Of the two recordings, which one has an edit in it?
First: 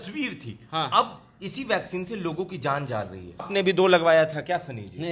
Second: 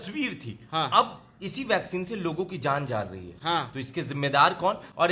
first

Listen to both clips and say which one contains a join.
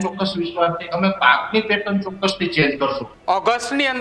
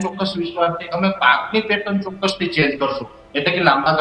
first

